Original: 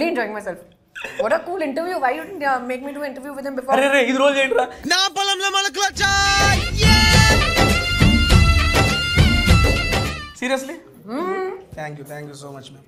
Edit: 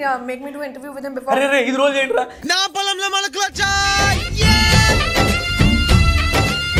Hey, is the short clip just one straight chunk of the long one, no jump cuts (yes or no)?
yes